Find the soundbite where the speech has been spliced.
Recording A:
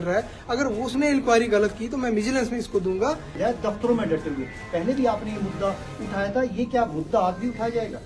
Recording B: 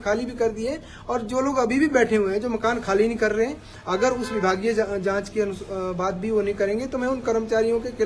A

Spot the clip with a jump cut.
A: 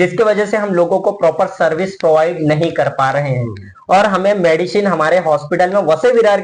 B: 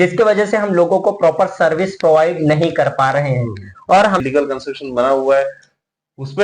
B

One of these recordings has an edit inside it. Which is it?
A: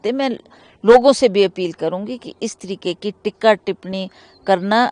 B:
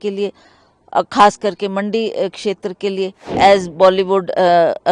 B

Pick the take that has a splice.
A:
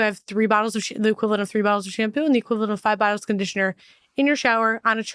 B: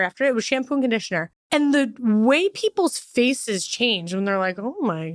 B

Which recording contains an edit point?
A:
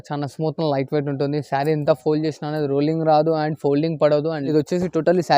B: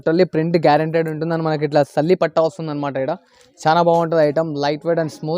A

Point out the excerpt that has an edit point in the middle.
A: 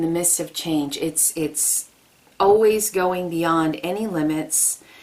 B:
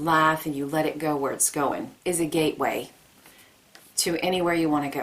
B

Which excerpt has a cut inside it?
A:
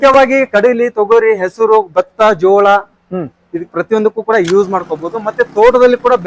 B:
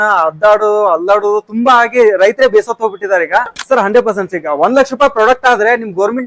B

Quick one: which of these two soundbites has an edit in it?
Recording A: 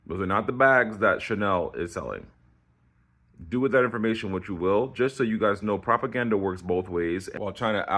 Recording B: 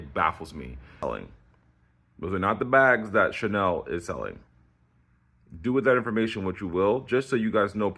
B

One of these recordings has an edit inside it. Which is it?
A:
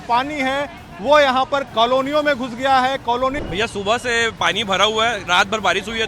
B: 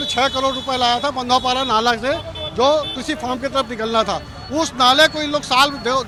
A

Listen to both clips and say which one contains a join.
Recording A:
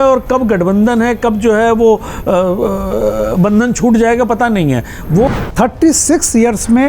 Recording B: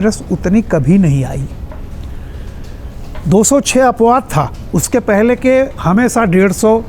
A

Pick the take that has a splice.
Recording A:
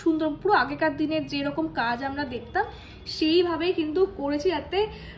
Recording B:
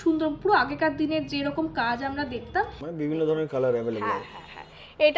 B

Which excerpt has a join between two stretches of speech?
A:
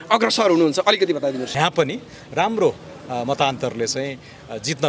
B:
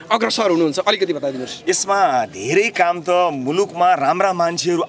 A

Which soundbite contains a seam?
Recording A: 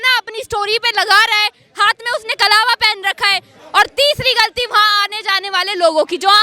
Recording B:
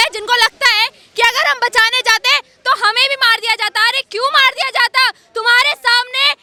A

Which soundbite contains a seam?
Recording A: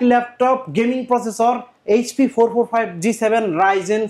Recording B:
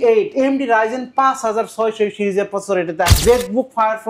B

